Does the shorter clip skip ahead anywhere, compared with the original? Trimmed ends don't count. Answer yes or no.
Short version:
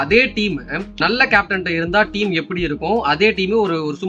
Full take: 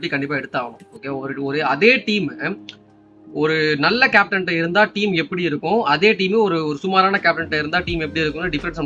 yes